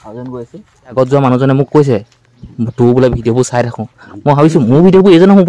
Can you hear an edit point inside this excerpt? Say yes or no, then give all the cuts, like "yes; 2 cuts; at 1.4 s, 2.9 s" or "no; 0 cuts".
yes; 1 cut; at 0.9 s